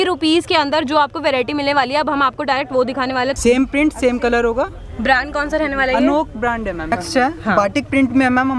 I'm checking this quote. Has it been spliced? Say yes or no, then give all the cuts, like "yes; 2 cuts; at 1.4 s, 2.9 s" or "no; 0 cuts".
yes; 2 cuts; at 3.4 s, 6.8 s